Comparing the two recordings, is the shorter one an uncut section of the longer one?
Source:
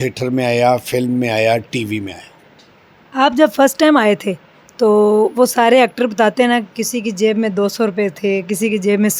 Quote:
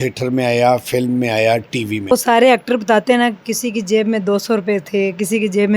no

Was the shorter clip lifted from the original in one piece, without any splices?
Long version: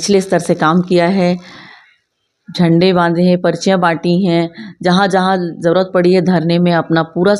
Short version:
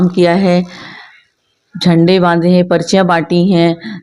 yes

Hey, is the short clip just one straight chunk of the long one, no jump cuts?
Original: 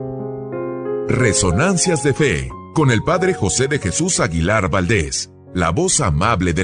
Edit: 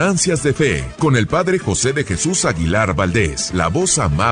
no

